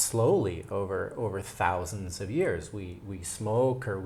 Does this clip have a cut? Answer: no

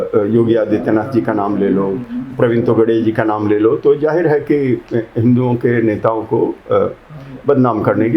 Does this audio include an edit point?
no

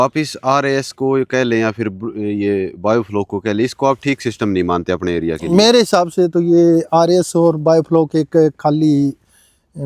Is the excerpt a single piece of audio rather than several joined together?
yes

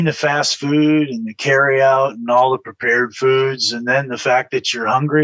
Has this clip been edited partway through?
no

